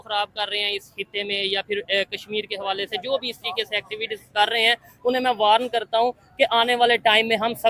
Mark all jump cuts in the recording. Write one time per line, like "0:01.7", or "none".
none